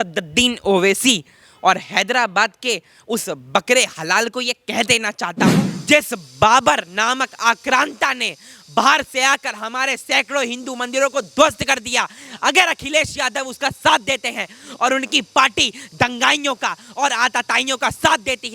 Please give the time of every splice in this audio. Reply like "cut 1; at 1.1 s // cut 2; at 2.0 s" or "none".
cut 1; at 5.7 s